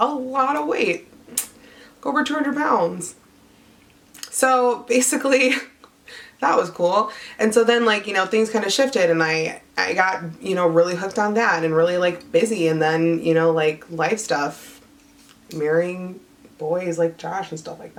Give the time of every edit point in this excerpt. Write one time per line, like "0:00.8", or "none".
none